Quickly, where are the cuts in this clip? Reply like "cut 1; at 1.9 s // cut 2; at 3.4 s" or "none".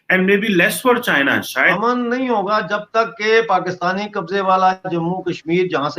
cut 1; at 1.7 s

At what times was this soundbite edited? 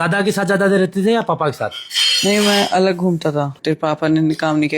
cut 1; at 3.5 s

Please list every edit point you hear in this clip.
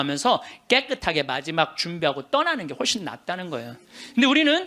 none

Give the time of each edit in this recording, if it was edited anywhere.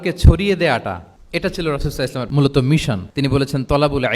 cut 1; at 1.1 s // cut 2; at 2.3 s // cut 3; at 3.1 s

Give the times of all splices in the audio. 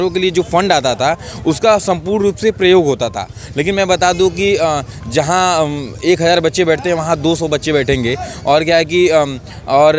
none

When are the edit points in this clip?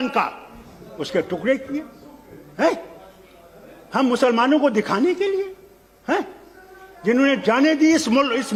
none

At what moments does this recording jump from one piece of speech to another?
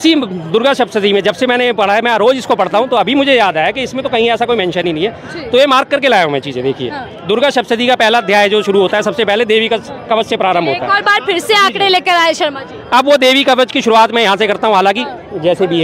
none

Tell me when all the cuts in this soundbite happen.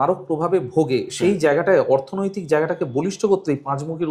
none

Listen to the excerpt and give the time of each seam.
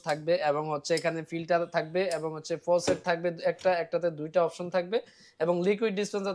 none

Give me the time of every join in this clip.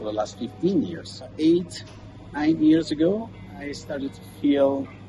cut 1; at 1.3 s

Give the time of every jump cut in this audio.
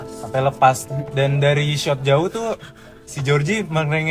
cut 1; at 0.9 s

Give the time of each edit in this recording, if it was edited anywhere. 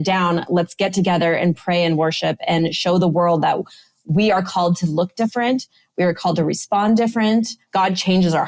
cut 1; at 7.6 s

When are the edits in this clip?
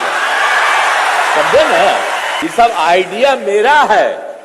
cut 1; at 2.4 s

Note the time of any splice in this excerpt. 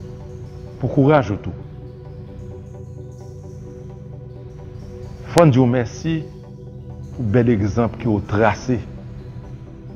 cut 1; at 0.8 s // cut 2; at 1.7 s // cut 3; at 5.3 s

